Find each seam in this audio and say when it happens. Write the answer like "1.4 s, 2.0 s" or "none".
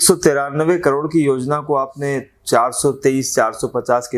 none